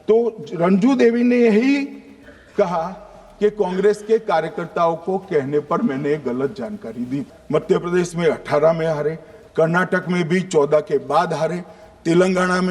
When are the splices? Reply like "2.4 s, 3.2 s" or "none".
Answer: 7.3 s

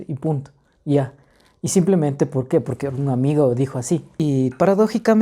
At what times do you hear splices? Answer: 4.1 s

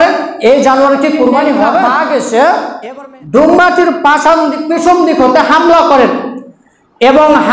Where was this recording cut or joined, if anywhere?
1.9 s

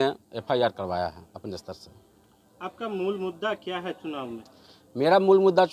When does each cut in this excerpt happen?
none

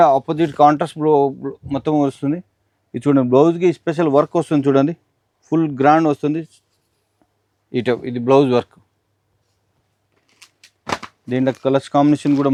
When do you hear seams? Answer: none

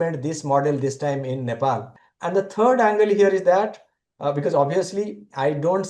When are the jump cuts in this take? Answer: 1.9 s

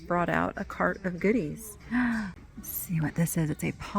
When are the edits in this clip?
2.3 s

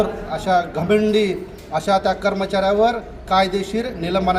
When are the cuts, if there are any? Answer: none

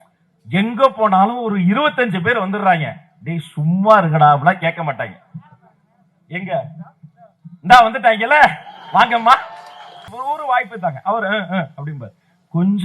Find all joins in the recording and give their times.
10.1 s

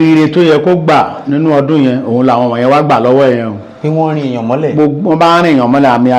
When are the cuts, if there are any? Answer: none

